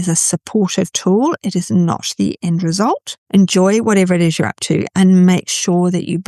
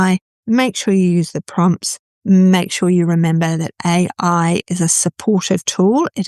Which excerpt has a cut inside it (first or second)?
first